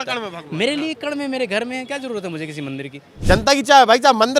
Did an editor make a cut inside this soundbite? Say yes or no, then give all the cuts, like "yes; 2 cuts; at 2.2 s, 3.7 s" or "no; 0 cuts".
yes; 1 cut; at 3.1 s